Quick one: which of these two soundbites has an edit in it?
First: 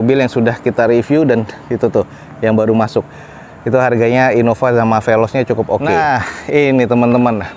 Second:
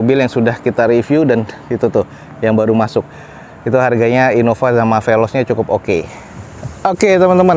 first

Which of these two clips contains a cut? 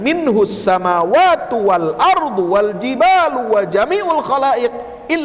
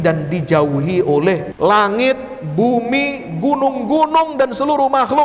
second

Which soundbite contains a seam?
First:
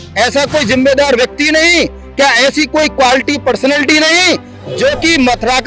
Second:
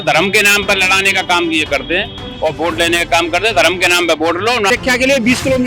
second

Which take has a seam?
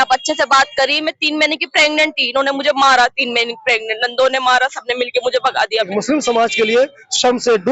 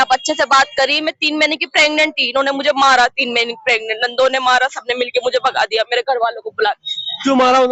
first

